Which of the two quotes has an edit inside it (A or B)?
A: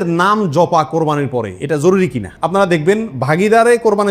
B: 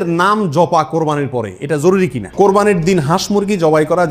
B